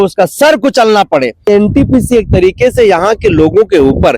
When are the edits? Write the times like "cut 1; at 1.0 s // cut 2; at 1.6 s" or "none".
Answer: cut 1; at 1.5 s